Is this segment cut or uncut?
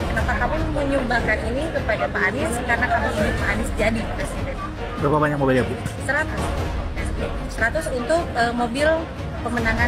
uncut